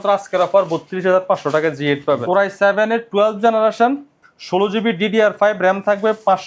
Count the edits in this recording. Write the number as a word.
one